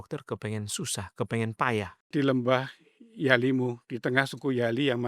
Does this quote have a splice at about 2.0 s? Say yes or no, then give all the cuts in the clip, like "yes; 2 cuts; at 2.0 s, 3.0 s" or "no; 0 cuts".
yes; 1 cut; at 2.0 s